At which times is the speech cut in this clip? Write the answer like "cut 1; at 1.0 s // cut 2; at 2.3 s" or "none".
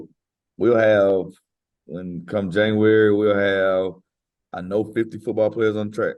none